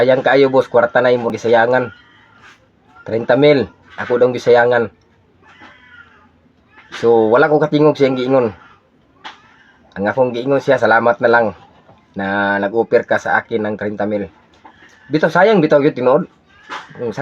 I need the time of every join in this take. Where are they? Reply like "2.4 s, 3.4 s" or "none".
1.3 s